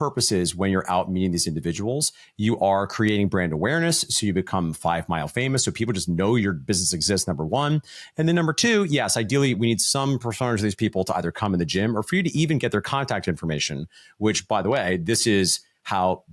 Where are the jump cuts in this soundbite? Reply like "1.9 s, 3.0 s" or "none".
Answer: none